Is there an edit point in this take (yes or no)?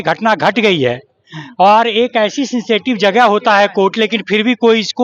no